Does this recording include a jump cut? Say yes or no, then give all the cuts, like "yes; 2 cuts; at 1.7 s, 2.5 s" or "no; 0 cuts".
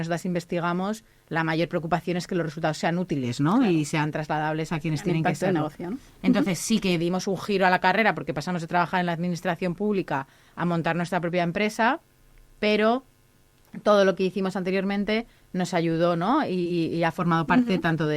no; 0 cuts